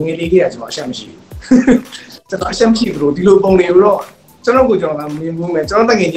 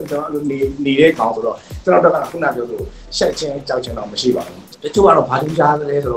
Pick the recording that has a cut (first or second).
second